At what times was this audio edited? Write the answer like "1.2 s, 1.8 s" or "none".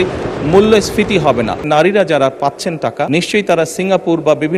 1.6 s, 3.1 s